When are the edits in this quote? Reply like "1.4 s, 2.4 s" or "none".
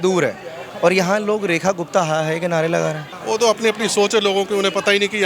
3.1 s